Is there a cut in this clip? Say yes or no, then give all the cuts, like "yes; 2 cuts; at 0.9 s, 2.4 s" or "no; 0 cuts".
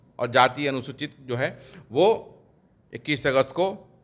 no; 0 cuts